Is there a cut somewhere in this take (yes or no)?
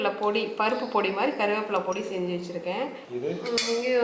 yes